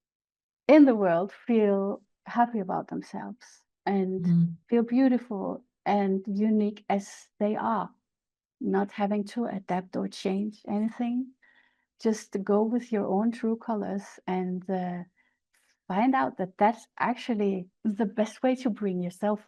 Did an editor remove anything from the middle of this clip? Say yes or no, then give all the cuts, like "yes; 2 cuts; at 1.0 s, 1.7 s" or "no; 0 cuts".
yes; 1 cut; at 17.7 s